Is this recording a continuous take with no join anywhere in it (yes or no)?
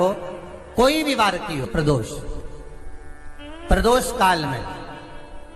no